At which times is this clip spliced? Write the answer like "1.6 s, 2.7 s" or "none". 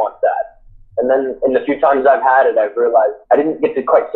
3.2 s